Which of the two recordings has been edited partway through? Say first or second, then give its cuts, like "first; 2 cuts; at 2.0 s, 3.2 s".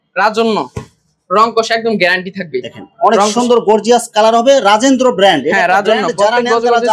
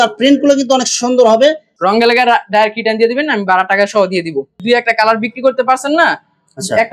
second; 2 cuts; at 1.7 s, 4.6 s